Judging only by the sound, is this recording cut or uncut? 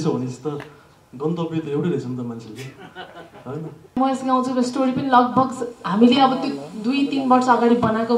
cut